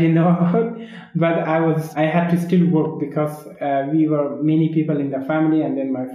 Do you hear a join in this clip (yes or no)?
yes